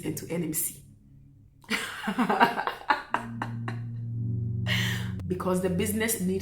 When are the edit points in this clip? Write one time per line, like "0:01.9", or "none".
0:05.1

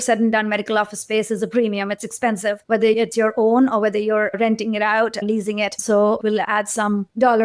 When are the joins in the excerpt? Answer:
0:06.2

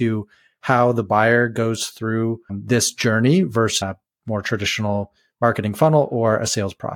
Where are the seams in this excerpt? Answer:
0:02.6
0:03.8

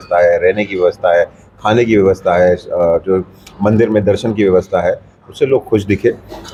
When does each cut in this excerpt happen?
none

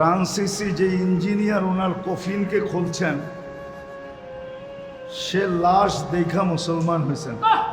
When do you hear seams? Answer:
0:03.4
0:05.3

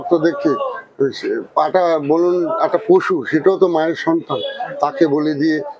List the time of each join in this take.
none

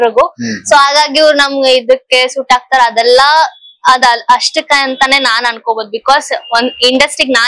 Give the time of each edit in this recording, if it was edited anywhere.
none

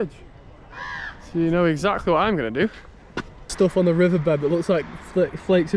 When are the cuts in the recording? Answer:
0:03.5

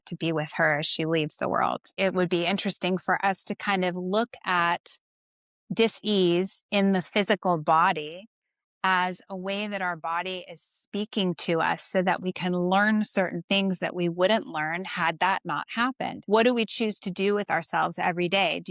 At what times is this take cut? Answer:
0:01.9
0:16.2

